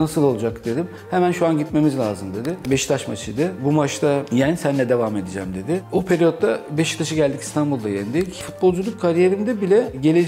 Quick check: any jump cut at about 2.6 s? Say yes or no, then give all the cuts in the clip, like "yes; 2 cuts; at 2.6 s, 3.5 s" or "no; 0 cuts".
yes; 2 cuts; at 2.6 s, 8.4 s